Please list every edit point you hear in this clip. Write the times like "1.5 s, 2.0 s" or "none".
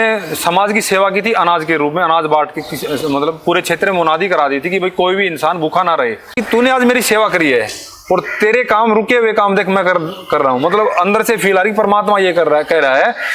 6.4 s